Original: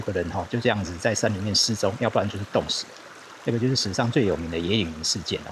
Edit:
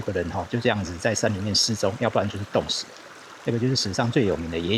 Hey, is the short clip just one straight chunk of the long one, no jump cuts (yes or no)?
yes